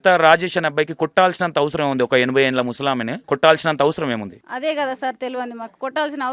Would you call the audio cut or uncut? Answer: cut